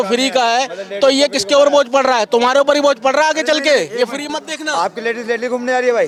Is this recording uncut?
yes; 0 cuts

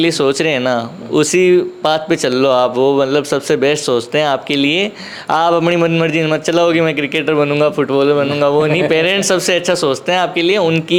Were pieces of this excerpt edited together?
no; 0 cuts

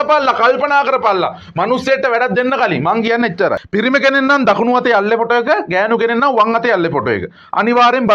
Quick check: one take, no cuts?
no; 1 cut; at 3.5 s

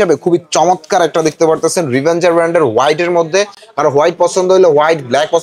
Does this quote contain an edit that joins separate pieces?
no; 0 cuts

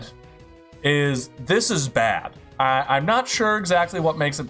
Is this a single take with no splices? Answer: yes; 0 cuts

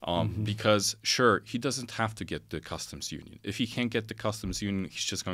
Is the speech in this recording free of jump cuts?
yes; 0 cuts

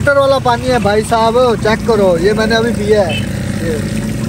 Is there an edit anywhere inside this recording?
no; 0 cuts

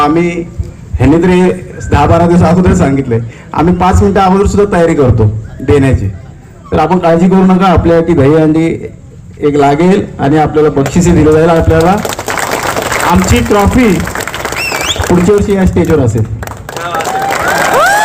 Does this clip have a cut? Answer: no; 0 cuts

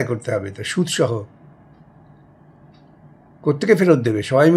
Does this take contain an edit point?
no; 0 cuts

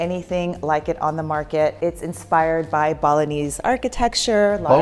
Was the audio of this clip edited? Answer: yes; 1 cut; at 1.8 s

